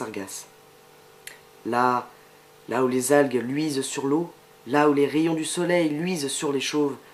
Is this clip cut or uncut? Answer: uncut